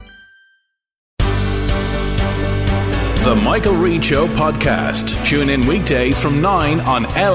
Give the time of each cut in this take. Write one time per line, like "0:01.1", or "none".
0:01.1

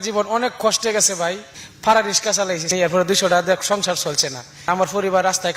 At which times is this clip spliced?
0:01.5
0:02.7
0:04.6

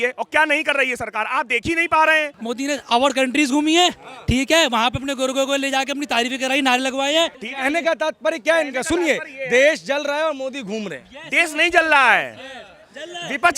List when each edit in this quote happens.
0:02.3
0:07.4

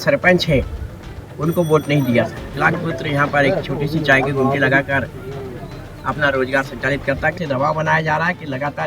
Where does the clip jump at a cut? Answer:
0:02.5
0:07.4

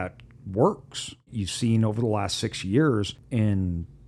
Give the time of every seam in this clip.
0:01.3
0:03.2

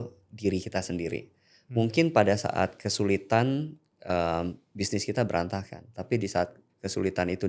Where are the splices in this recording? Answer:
none

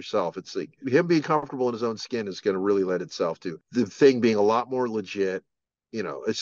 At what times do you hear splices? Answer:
0:00.8
0:03.5

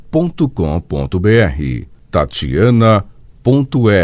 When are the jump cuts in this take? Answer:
0:01.6

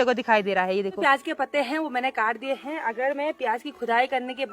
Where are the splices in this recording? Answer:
0:01.0

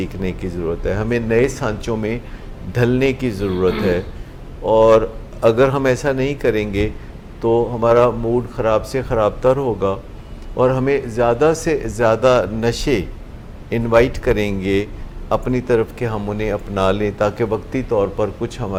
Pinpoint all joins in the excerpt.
none

